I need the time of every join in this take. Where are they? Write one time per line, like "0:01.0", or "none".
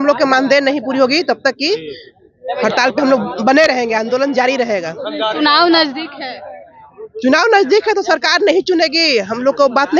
none

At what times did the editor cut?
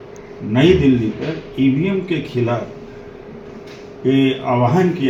none

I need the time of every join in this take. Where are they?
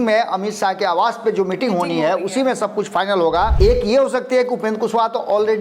0:03.5

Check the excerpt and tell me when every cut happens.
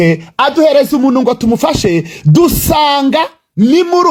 none

